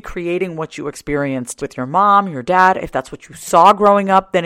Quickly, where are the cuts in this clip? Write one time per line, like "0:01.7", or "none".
0:01.5